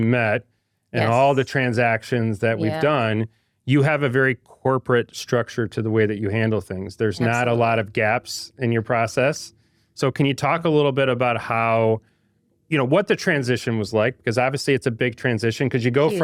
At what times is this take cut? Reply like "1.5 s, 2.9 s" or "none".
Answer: none